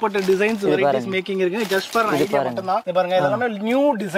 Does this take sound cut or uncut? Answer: uncut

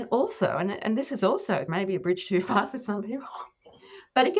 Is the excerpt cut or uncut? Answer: cut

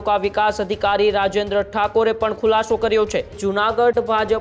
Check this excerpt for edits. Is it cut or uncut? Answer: cut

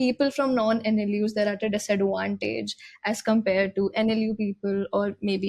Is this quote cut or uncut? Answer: uncut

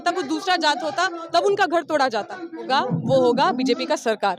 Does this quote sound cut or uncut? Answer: cut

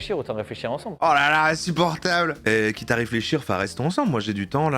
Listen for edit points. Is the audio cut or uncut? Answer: cut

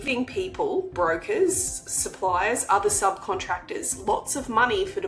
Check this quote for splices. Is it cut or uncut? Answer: uncut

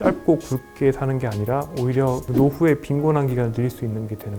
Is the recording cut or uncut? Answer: uncut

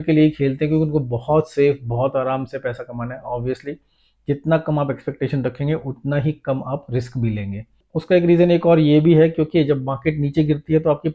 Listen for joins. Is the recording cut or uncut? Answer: cut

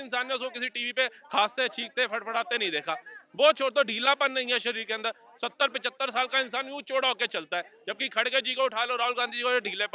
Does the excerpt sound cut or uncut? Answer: uncut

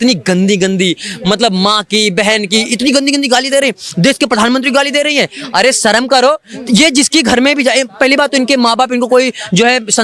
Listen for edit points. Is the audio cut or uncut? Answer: uncut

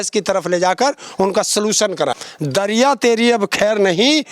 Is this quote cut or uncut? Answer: cut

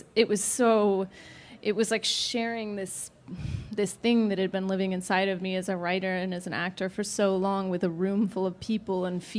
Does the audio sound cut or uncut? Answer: uncut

